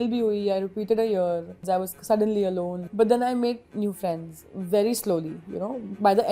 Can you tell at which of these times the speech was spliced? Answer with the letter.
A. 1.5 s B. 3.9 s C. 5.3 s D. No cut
A